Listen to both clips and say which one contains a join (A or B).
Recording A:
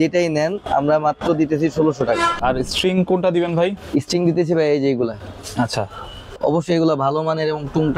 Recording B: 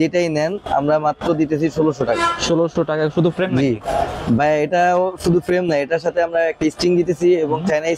A